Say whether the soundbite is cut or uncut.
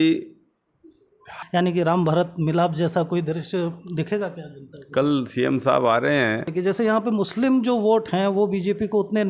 cut